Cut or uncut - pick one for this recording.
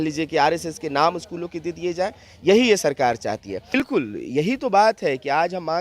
cut